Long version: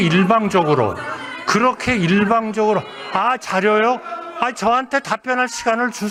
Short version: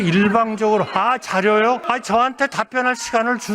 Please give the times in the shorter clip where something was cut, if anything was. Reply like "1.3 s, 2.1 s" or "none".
0.9 s, 1.8 s

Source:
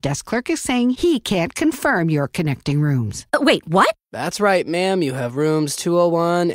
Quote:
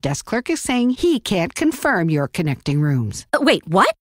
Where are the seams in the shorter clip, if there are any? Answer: none

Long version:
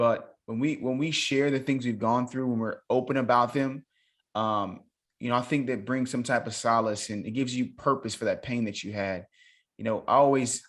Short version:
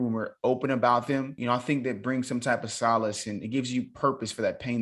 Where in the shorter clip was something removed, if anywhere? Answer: 1.3 s

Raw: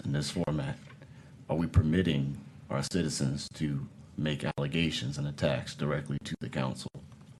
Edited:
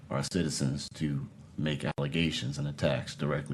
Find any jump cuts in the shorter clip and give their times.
none

